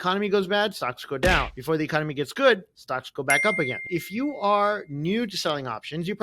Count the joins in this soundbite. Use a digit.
1